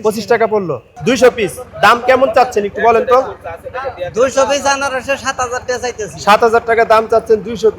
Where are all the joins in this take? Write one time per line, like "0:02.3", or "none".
0:00.9